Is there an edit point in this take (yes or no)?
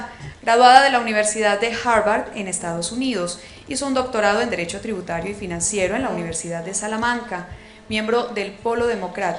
yes